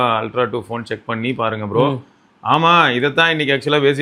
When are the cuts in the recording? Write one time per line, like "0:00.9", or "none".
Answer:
none